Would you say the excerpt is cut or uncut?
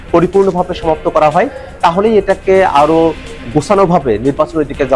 uncut